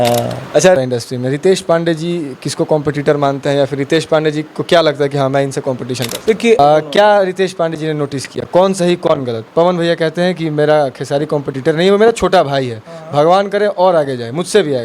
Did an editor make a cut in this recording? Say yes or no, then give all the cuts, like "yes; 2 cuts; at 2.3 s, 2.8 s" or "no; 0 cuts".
yes; 2 cuts; at 0.8 s, 6.6 s